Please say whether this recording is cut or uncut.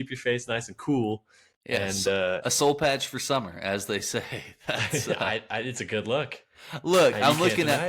uncut